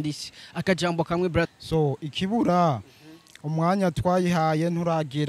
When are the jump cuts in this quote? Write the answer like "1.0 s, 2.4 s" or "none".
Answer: 1.5 s